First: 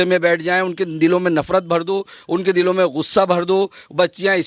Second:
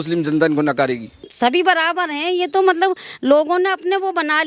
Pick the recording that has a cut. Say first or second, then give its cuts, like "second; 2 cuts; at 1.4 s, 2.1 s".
second; 1 cut; at 1.3 s